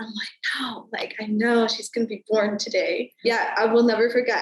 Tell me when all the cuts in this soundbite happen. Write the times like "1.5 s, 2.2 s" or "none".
3.1 s